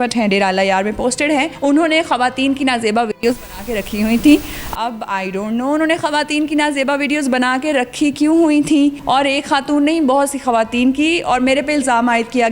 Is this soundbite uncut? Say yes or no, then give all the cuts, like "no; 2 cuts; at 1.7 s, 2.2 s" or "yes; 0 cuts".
no; 2 cuts; at 1.5 s, 9.0 s